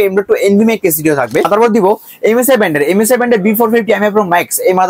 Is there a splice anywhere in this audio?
yes; 1 cut; at 1.5 s

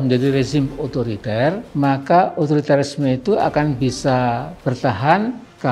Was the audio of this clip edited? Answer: yes; 1 cut; at 1.6 s

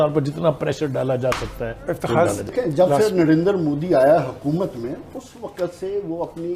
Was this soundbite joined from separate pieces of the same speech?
yes; 1 cut; at 2.4 s

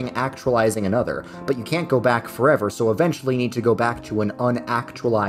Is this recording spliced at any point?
no; 0 cuts

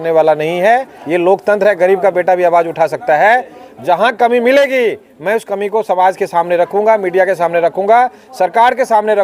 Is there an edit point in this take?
yes; 1 cut; at 1.0 s

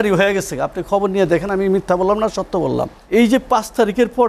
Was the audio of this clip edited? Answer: yes; 1 cut; at 3.0 s

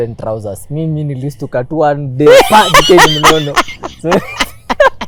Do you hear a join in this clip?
no; 0 cuts

